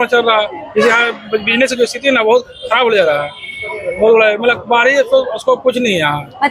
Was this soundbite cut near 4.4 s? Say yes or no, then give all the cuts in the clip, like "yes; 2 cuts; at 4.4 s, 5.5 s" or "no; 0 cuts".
no; 0 cuts